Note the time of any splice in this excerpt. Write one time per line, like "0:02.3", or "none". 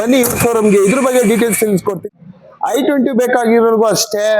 0:02.0